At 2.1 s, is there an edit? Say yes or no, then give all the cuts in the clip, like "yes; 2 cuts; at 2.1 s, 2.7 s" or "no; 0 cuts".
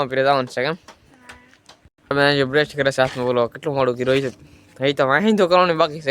yes; 1 cut; at 2.1 s